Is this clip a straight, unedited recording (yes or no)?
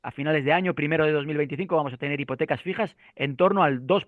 yes